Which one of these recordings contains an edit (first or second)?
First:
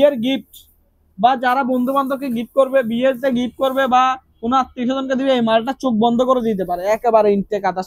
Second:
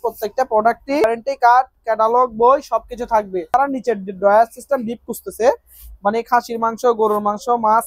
second